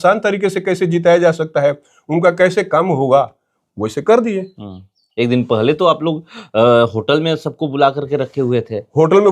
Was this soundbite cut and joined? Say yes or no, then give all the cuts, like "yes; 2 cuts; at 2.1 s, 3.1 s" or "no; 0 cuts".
no; 0 cuts